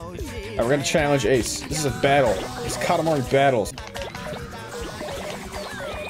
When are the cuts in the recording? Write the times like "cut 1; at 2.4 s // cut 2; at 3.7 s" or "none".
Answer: cut 1; at 3.7 s

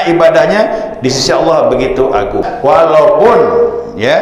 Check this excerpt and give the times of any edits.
cut 1; at 2.5 s

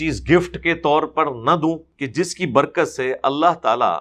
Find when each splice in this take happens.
cut 1; at 1.9 s

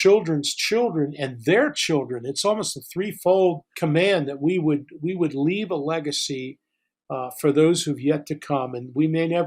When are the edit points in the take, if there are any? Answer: cut 1; at 3.7 s

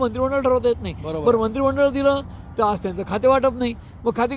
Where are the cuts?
none

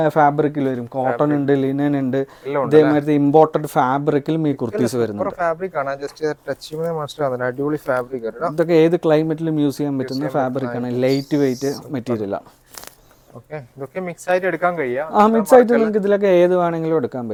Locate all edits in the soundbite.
none

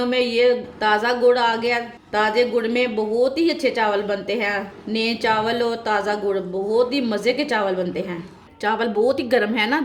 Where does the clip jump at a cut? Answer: cut 1; at 8.5 s

